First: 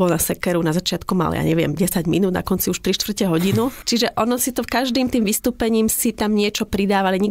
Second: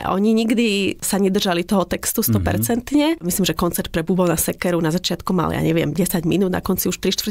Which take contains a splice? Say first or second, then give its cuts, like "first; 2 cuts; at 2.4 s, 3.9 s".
second; 2 cuts; at 1.0 s, 3.2 s